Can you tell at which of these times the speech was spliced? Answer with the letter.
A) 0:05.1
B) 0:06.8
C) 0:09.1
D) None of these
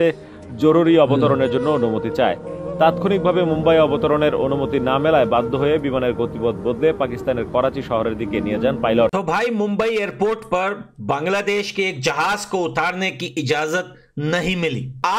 C